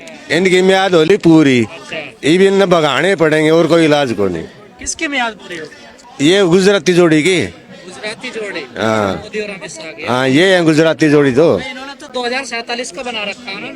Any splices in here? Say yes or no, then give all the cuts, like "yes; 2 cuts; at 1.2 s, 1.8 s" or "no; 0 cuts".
no; 0 cuts